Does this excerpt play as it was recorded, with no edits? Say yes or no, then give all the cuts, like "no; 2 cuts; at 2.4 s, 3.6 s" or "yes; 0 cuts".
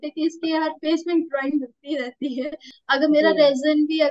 no; 1 cut; at 2.7 s